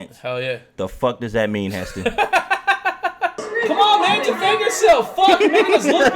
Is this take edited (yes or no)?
yes